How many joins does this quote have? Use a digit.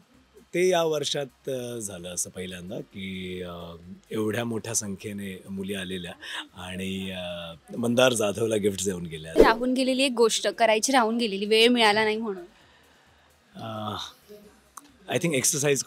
1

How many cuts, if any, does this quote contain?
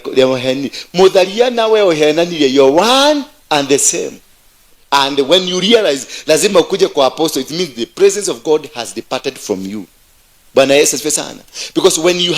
1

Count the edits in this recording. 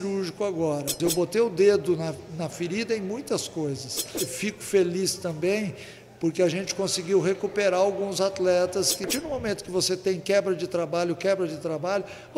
3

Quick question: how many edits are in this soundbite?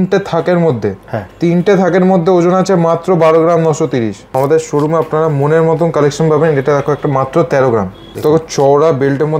2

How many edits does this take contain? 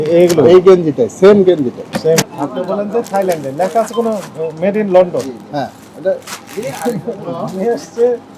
1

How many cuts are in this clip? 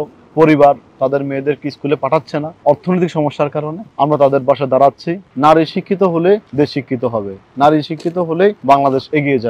5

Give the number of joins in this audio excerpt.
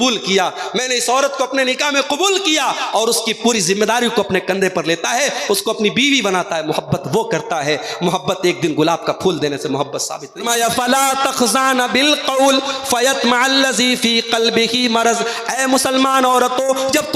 1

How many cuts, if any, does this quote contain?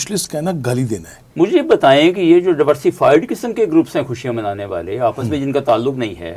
1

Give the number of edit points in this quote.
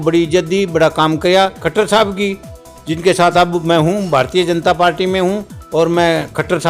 1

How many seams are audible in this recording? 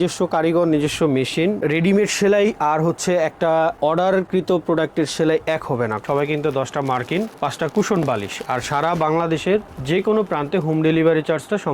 3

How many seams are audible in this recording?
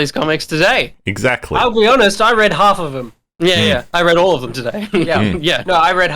1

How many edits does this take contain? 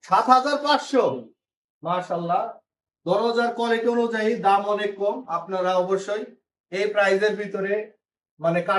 0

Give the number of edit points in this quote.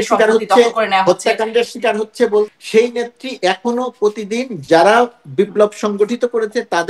1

